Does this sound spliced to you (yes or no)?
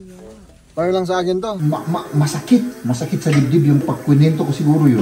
yes